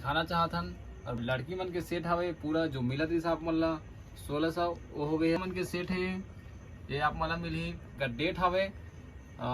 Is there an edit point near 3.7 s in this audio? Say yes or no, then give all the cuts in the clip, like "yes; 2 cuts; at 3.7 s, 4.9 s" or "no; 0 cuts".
no; 3 cuts; at 1.2 s, 5.4 s, 8.0 s